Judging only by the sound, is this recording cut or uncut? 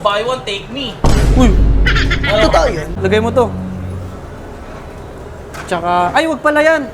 cut